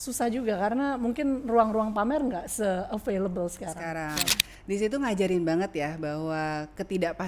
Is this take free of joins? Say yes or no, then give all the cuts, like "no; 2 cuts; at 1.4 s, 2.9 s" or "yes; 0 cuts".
no; 1 cut; at 4.4 s